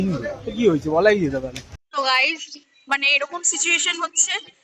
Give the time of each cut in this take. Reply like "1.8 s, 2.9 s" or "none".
1.9 s